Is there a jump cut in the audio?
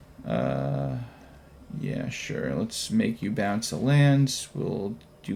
no; 0 cuts

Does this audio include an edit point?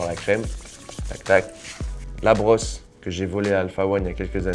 yes; 1 cut; at 2.0 s

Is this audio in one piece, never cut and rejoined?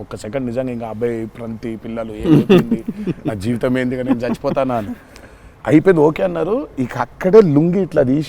yes; 0 cuts

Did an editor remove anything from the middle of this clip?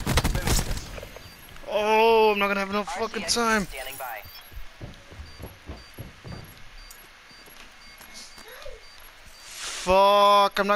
no; 0 cuts

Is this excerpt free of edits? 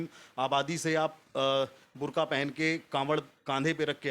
yes; 0 cuts

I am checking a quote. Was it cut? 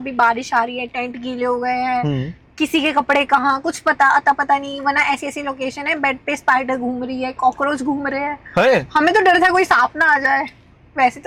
no; 0 cuts

